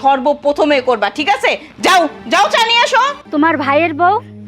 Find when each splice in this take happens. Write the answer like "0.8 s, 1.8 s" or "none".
3.2 s